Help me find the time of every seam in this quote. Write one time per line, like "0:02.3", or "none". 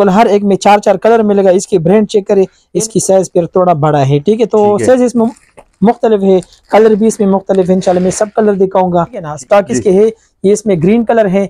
0:02.6
0:09.3